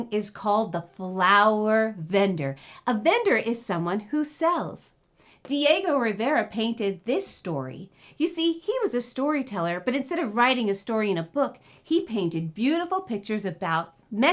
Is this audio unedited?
yes; 0 cuts

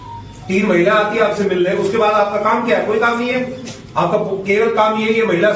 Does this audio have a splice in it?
no; 0 cuts

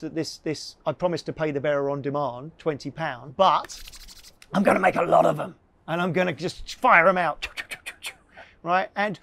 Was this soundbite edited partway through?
yes; 1 cut; at 3.2 s

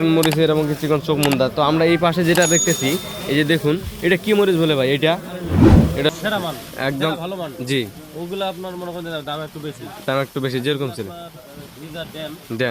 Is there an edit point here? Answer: yes; 2 cuts; at 5.5 s, 6.0 s

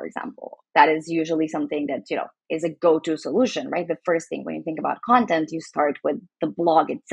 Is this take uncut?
yes; 0 cuts

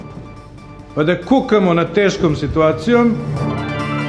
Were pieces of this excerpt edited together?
yes; 1 cut; at 3.0 s

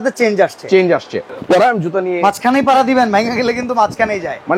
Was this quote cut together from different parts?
yes; 1 cut; at 1.3 s

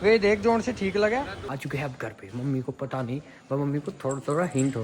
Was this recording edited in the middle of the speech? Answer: yes; 1 cut; at 1.4 s

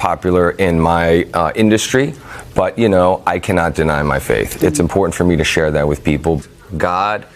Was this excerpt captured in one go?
no; 2 cuts; at 4.5 s, 6.4 s

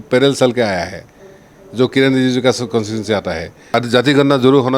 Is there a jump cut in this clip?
yes; 1 cut; at 3.6 s

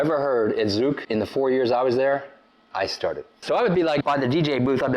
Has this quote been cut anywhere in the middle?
yes; 3 cuts; at 1.0 s, 3.3 s, 4.0 s

